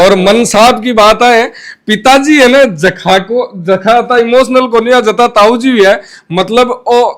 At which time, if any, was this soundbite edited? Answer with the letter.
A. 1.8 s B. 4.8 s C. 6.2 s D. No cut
D